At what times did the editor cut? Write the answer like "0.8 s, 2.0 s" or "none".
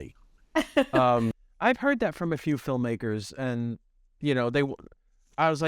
1.5 s